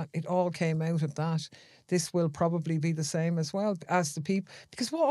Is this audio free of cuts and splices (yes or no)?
yes